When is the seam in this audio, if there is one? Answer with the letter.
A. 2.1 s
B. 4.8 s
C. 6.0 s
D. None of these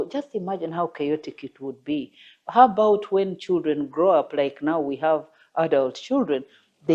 D